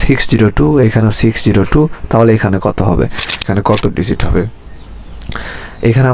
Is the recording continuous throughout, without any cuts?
no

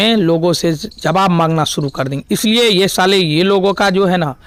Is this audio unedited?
yes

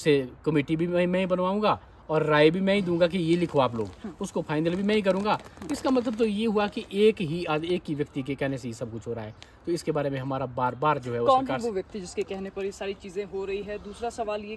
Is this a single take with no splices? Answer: yes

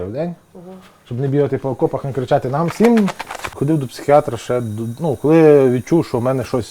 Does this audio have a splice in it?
yes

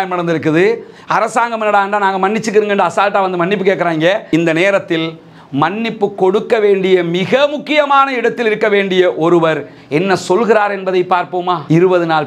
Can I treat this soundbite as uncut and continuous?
no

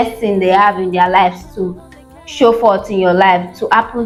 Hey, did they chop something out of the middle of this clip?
no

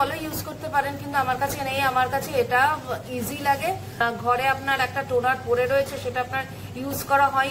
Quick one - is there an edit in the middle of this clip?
yes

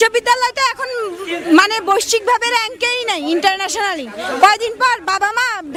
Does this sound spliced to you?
no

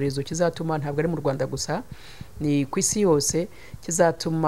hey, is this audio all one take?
yes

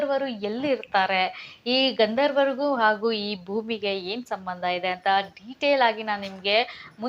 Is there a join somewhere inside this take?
no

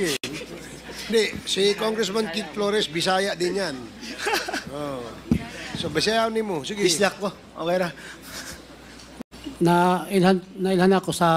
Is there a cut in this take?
yes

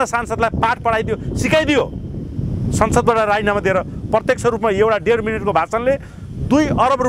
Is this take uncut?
yes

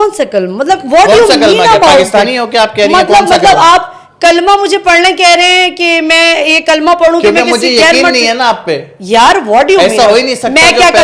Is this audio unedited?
yes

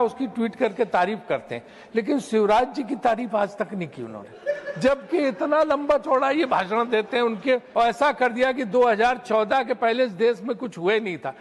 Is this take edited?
yes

